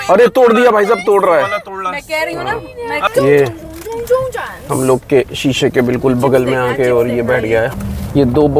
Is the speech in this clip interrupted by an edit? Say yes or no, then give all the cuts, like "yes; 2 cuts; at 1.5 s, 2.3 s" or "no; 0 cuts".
yes; 1 cut; at 3.1 s